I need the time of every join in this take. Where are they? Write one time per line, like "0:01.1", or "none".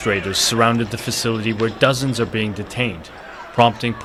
none